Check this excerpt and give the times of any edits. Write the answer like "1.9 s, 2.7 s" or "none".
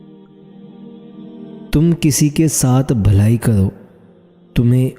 1.7 s